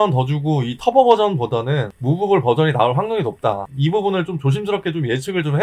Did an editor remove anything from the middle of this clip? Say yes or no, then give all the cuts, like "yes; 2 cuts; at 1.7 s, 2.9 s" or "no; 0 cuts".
no; 0 cuts